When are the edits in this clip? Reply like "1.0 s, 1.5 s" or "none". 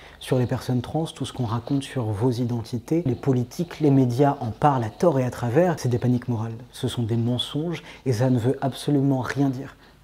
3.1 s, 5.7 s